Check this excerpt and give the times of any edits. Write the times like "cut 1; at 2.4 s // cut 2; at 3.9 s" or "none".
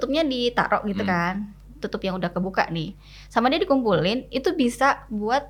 none